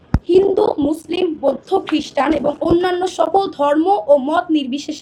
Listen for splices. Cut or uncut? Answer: uncut